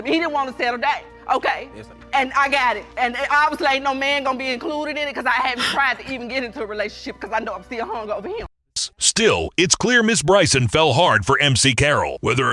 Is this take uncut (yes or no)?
yes